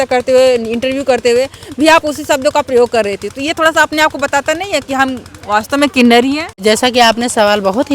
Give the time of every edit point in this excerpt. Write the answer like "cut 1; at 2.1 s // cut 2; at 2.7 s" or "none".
cut 1; at 6.6 s